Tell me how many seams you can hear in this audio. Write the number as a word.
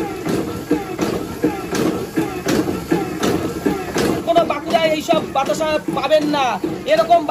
one